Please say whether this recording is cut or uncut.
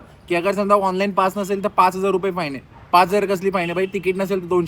uncut